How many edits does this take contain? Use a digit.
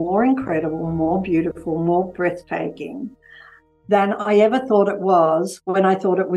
0